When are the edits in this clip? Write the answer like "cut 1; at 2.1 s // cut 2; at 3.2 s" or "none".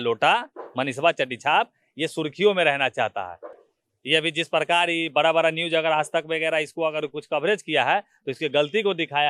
none